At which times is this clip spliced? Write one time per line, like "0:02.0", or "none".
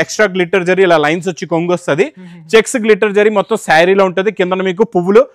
none